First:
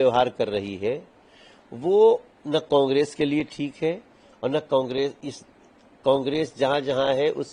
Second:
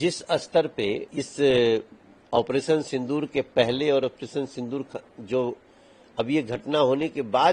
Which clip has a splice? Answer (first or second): second